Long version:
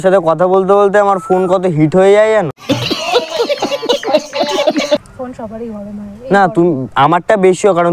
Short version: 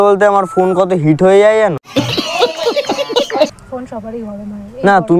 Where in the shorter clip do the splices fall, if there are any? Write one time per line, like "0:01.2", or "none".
0:03.6